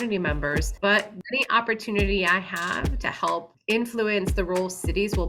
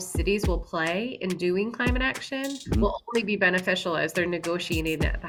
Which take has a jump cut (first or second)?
first